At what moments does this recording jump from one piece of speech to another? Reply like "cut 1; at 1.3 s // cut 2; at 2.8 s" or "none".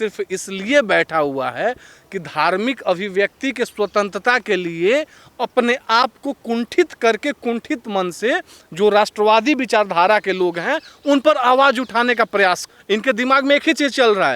cut 1; at 12.7 s